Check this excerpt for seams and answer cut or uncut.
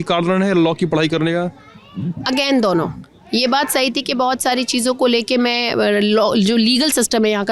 uncut